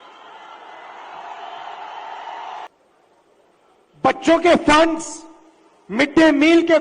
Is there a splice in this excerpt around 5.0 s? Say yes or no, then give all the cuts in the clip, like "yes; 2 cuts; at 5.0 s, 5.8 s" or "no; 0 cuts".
no; 1 cut; at 2.7 s